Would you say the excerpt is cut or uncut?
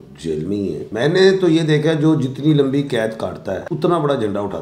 cut